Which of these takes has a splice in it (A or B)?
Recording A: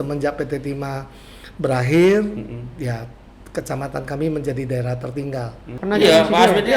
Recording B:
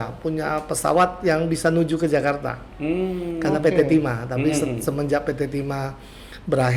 A